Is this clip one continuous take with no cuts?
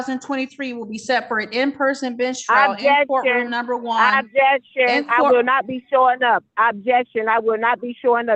yes; 0 cuts

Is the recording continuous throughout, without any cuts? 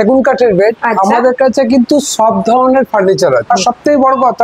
no; 1 cut; at 3.5 s

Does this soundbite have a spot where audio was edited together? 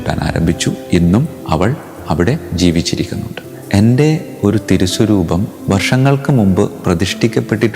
yes; 1 cut; at 3.5 s

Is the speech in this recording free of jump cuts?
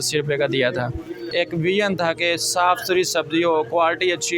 no; 1 cut; at 1.2 s

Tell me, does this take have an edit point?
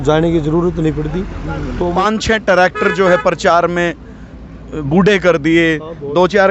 yes; 1 cut; at 1.9 s

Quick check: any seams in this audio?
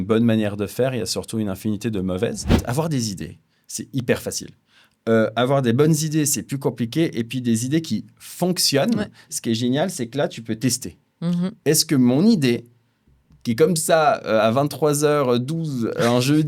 yes; 1 cut; at 2.6 s

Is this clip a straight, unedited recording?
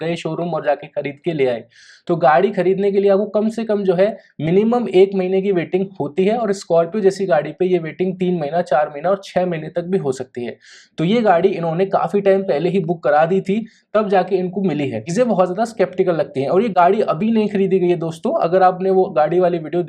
no; 1 cut; at 15.0 s

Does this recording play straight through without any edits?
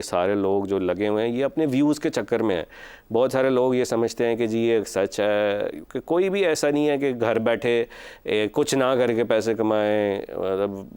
yes; 0 cuts

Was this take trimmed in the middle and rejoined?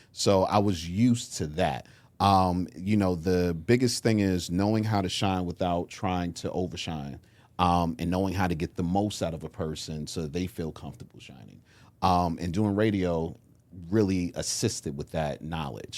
no; 0 cuts

